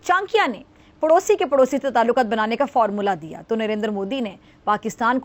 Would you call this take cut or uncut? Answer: uncut